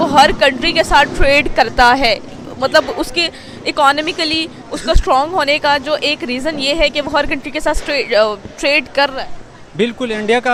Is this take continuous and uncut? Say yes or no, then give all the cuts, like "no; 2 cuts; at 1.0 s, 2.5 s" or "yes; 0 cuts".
yes; 0 cuts